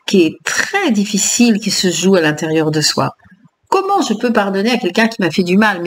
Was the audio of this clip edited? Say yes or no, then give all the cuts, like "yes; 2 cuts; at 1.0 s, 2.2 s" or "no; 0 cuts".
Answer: no; 0 cuts